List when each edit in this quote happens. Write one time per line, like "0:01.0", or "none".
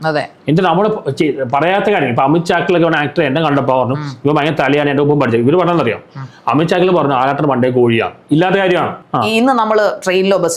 0:09.0